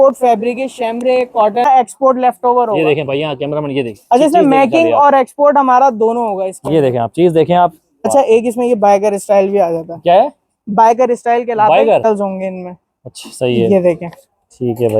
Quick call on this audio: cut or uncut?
cut